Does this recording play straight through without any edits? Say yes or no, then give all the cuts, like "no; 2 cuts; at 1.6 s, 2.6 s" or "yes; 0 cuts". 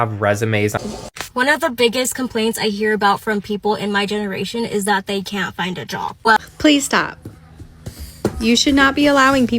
no; 2 cuts; at 0.8 s, 6.4 s